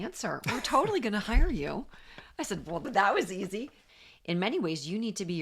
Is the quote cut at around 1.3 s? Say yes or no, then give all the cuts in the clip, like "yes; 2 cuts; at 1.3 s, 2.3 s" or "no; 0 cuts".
no; 2 cuts; at 2.8 s, 3.8 s